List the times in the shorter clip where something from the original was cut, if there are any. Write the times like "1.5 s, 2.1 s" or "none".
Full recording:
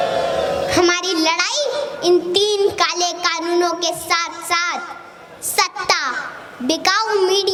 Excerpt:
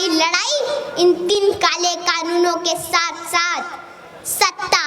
1.3 s